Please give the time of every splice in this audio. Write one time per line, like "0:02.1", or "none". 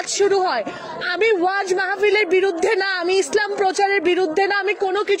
none

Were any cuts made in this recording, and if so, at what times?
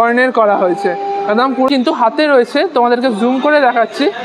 0:01.7

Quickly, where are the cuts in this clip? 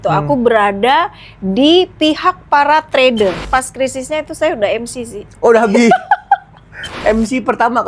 0:03.4
0:06.9

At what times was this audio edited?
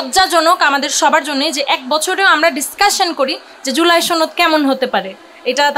none

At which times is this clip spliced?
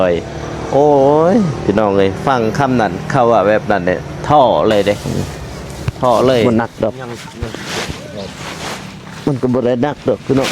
0:06.4

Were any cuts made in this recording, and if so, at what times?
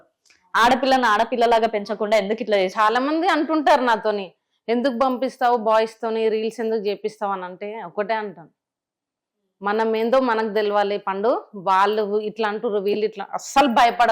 none

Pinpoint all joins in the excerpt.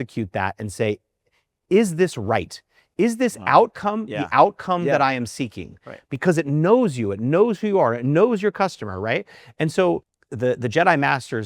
0:10.2

